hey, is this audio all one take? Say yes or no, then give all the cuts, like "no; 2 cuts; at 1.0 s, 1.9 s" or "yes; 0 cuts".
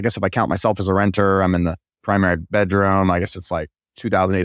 no; 1 cut; at 2.4 s